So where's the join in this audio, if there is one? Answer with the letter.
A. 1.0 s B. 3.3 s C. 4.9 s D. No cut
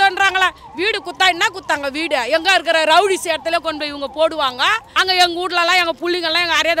C